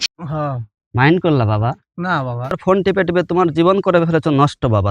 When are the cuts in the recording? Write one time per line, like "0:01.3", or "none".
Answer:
0:02.5